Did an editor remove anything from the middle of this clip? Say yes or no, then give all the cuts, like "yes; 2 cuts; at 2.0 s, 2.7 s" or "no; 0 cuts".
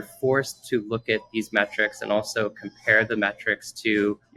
no; 0 cuts